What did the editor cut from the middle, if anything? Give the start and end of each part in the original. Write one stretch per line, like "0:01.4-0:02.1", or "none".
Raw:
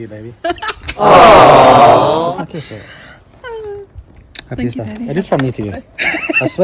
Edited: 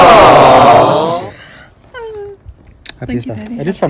0:02.4-0:02.7